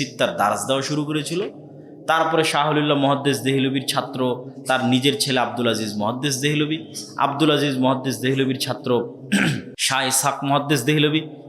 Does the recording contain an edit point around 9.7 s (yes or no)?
yes